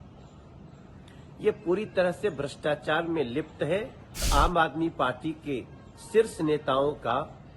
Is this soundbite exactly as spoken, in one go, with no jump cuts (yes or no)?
no